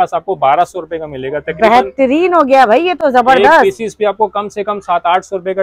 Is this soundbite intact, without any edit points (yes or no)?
yes